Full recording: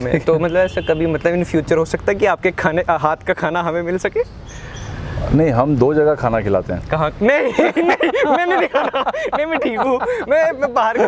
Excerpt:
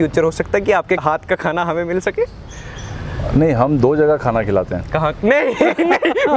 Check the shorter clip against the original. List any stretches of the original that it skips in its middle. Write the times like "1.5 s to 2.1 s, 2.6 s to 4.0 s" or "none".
2.5 s to 3.0 s